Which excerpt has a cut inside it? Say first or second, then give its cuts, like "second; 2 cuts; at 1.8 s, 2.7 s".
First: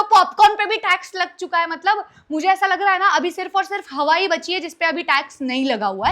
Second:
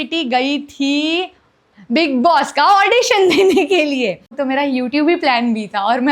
second; 1 cut; at 4.3 s